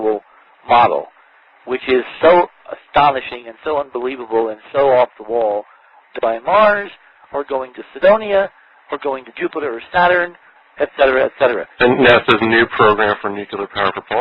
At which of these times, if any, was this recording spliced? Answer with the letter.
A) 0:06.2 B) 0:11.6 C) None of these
C